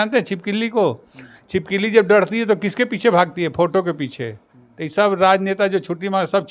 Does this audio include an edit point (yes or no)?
no